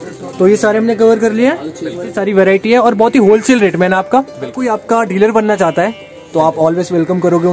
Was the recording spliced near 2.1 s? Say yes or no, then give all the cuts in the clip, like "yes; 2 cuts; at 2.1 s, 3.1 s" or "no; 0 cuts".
yes; 2 cuts; at 2.1 s, 4.6 s